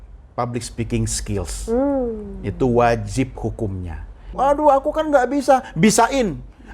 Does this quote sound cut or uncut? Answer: cut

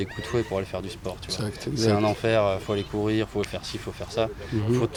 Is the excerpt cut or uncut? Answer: uncut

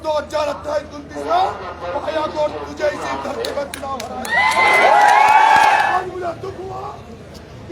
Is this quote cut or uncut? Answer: cut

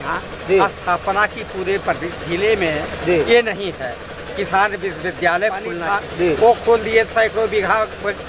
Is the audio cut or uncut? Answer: cut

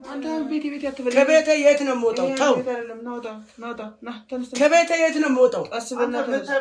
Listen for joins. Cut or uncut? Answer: uncut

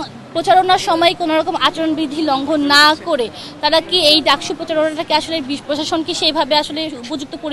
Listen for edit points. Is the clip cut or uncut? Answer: uncut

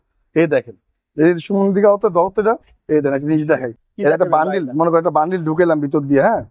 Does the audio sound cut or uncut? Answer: uncut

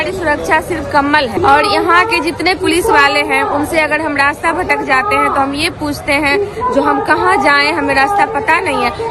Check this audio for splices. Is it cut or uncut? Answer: cut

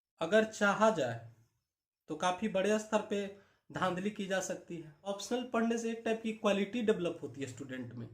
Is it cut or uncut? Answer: cut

